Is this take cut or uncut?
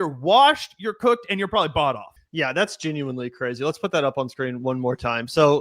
cut